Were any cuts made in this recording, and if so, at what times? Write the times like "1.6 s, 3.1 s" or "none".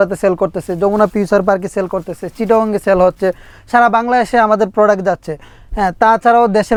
none